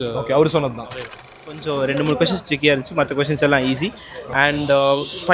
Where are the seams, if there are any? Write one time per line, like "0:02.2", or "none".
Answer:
0:01.6